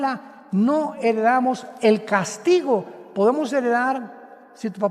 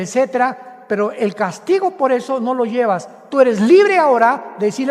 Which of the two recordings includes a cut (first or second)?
second